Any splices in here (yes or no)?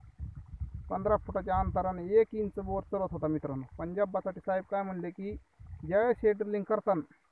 no